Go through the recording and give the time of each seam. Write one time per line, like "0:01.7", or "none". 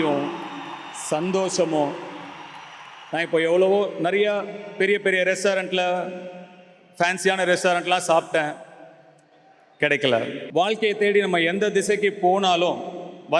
0:10.4